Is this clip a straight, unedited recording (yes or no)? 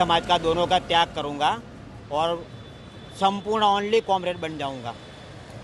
yes